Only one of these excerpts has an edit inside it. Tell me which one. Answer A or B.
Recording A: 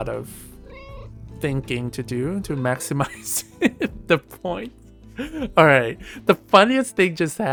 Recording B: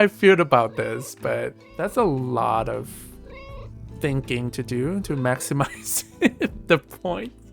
B